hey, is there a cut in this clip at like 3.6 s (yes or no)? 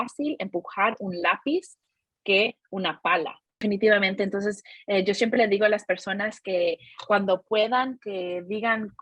yes